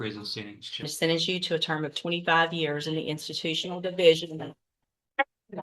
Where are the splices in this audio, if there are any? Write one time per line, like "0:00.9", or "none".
0:00.9